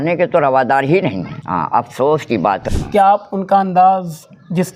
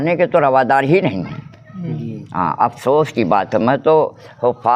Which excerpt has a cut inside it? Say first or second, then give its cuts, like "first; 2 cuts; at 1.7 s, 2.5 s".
first; 2 cuts; at 1.4 s, 2.6 s